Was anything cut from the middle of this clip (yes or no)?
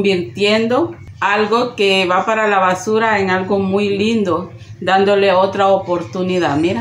yes